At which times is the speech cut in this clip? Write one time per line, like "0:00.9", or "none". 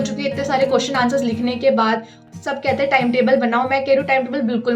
0:02.2